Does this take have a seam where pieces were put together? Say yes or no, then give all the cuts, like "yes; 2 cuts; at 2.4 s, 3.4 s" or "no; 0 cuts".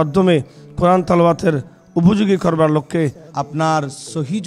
yes; 1 cut; at 3.2 s